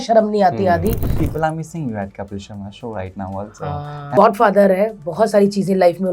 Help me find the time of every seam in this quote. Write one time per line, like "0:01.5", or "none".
0:01.2
0:03.9